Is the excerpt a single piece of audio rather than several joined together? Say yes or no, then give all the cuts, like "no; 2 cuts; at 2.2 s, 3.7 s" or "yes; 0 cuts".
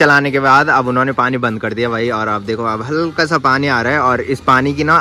yes; 0 cuts